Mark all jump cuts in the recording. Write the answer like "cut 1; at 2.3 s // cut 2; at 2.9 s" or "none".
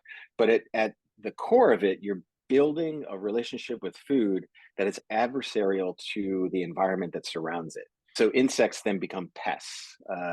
cut 1; at 5.0 s // cut 2; at 8.0 s